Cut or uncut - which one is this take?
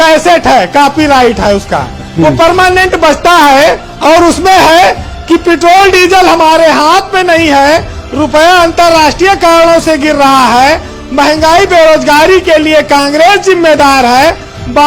uncut